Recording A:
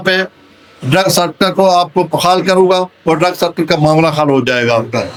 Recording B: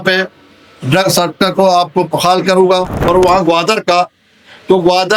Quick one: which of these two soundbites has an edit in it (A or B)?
B